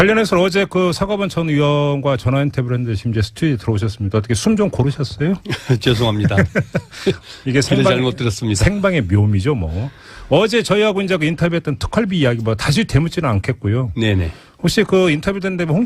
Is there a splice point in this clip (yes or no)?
yes